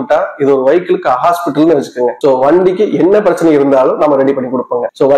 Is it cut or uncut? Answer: uncut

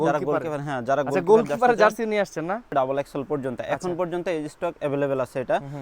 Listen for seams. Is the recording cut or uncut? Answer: cut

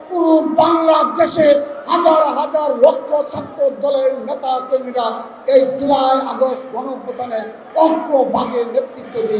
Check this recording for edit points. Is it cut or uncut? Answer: uncut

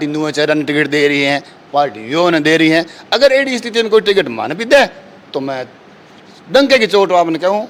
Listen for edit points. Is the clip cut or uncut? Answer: uncut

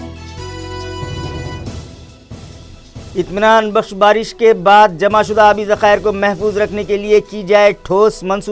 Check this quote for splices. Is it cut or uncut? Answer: cut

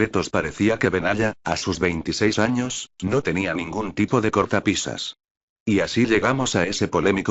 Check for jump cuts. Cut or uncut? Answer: cut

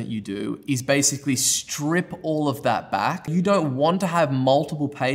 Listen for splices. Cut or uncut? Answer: cut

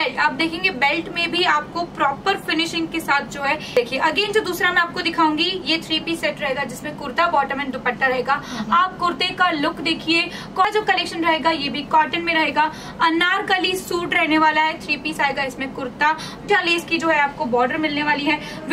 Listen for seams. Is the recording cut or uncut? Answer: cut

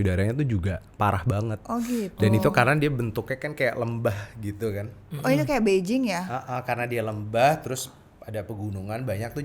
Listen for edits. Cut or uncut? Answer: uncut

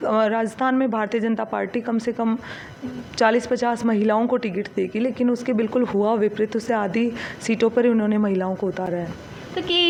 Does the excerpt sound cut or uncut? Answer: uncut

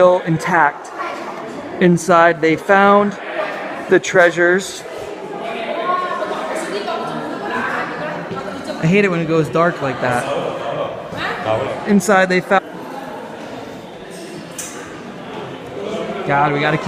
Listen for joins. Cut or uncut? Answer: uncut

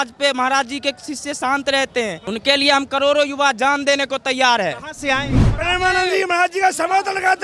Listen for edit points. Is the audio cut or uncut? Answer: cut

